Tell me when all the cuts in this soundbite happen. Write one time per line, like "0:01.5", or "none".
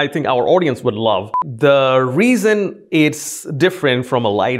0:01.4